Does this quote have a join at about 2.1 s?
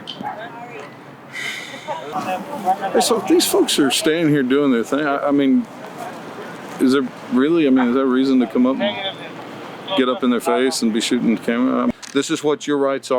yes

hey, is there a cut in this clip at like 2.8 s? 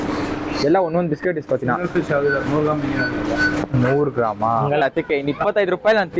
no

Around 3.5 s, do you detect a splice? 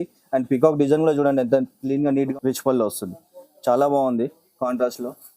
no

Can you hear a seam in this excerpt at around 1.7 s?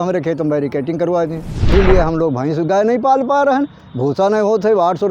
yes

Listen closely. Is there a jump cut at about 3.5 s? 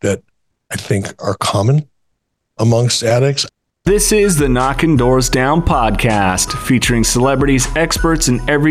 yes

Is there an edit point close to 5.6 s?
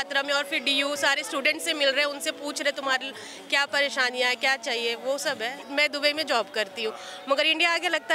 yes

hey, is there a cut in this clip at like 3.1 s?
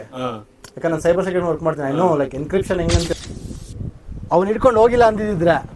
yes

